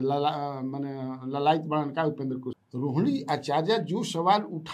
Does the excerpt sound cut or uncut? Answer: cut